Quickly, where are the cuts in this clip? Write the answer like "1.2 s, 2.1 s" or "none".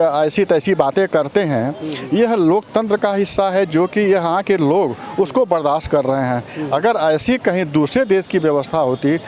none